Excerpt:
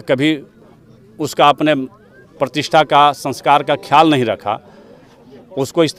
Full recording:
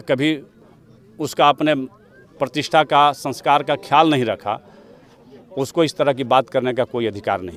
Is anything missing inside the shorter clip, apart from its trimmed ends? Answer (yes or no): no